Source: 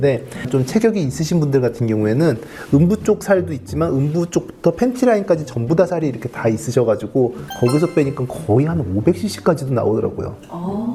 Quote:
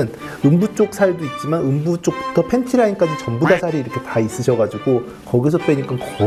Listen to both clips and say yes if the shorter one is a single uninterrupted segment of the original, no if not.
yes